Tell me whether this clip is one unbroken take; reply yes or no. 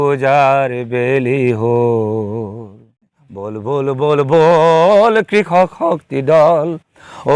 no